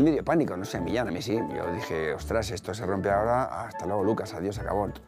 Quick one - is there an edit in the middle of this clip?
no; 0 cuts

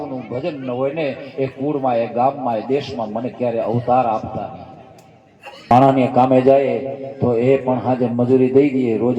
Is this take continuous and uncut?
no; 1 cut; at 5.7 s

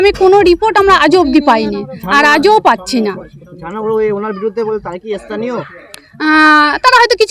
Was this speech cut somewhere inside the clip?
no; 0 cuts

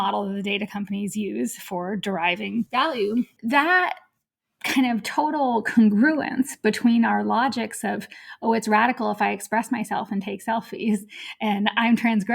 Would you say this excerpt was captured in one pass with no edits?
no; 2 cuts; at 2.7 s, 3.4 s

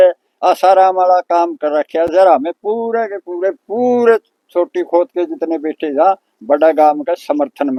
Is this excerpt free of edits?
yes; 0 cuts

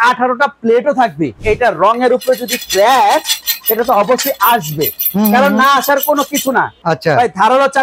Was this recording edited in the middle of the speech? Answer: yes; 2 cuts; at 1.4 s, 6.8 s

